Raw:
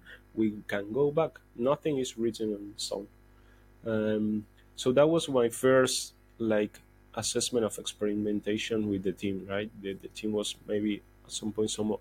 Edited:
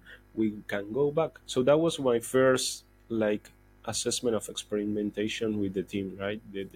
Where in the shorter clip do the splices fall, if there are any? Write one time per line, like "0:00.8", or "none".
0:01.4